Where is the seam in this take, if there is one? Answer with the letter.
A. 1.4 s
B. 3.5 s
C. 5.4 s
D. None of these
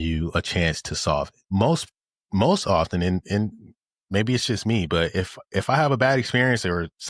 A